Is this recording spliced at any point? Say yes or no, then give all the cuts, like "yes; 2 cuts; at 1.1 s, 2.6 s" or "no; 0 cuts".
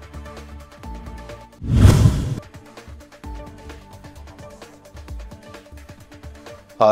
no; 0 cuts